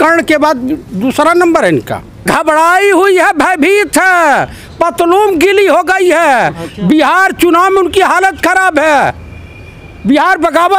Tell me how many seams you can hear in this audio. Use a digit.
1